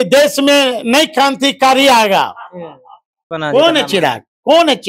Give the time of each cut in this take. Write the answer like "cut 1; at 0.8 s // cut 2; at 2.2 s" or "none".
cut 1; at 3.3 s